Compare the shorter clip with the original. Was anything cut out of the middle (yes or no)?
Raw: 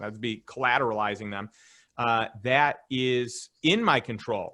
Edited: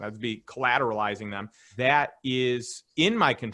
yes